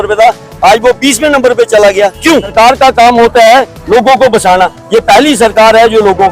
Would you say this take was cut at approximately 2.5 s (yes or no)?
yes